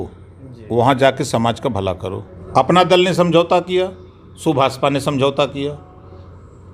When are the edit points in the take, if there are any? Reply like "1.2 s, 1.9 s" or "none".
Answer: 2.1 s

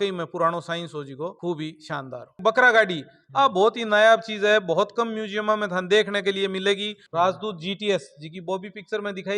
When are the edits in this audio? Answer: 2.3 s, 7.0 s

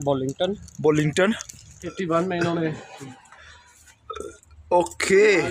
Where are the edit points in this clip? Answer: 1.9 s

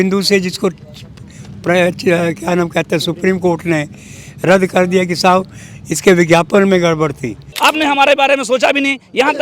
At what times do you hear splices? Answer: 7.5 s

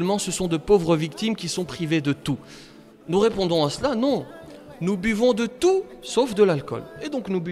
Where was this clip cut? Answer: none

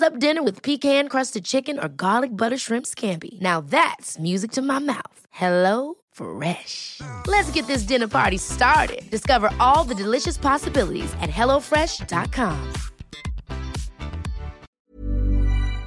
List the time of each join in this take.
14.8 s

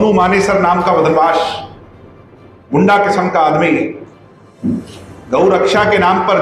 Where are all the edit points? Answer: none

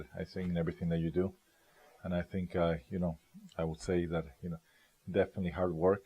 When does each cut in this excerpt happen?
1.0 s

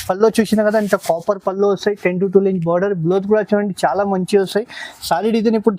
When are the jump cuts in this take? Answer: none

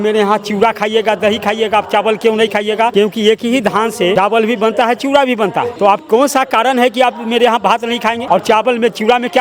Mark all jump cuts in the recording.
2.9 s, 4.1 s, 5.7 s, 8.2 s

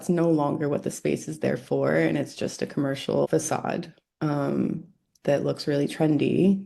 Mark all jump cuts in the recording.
3.3 s

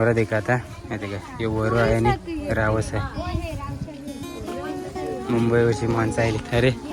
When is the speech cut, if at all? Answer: none

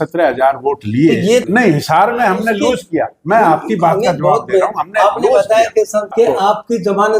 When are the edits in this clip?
1.5 s, 6.1 s

